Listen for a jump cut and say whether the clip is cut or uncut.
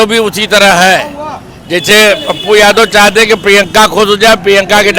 uncut